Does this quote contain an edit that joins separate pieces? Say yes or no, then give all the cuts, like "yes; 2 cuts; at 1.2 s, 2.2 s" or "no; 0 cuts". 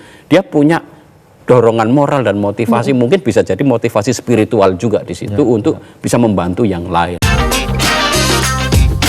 yes; 1 cut; at 7.2 s